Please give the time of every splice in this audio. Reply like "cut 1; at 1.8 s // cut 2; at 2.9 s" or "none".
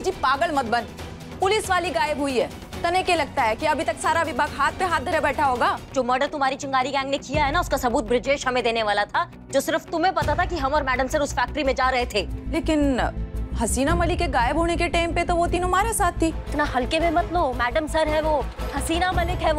cut 1; at 5.8 s // cut 2; at 12.4 s // cut 3; at 16.4 s